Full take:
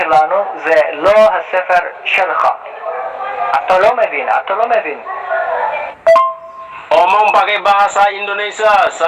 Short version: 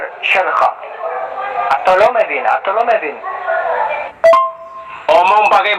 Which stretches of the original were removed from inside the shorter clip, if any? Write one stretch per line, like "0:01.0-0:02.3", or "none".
none